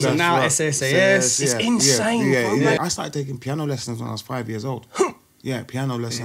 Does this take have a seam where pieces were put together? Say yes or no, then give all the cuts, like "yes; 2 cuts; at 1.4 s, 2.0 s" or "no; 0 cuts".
yes; 1 cut; at 2.8 s